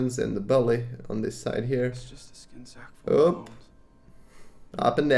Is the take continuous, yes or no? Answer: yes